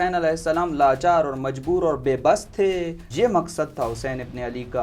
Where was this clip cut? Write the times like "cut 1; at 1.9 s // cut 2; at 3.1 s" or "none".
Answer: cut 1; at 3.0 s